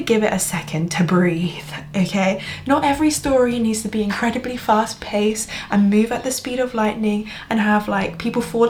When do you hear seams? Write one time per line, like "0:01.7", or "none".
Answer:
none